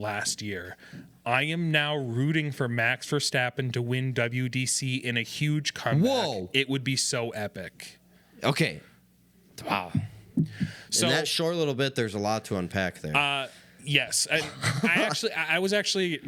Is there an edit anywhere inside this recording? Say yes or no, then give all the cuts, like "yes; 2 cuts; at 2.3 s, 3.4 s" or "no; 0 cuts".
no; 0 cuts